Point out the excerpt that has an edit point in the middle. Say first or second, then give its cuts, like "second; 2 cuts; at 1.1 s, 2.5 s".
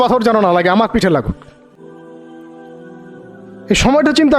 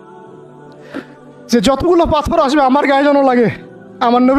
first; 2 cuts; at 1.7 s, 3.7 s